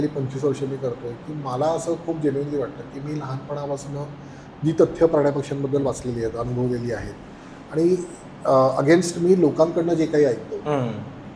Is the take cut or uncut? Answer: uncut